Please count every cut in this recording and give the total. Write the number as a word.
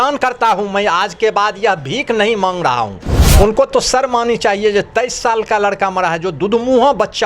one